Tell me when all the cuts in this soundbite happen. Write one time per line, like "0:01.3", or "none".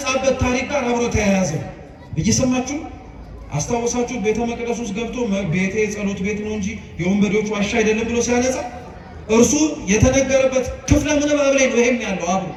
none

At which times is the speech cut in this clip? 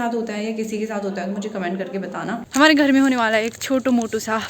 0:02.4

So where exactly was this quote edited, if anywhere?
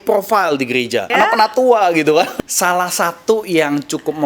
0:01.1
0:02.3

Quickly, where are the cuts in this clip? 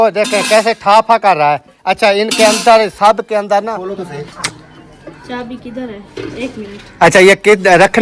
0:03.8

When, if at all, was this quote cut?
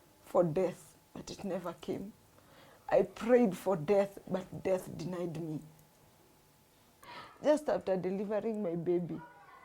0:07.0

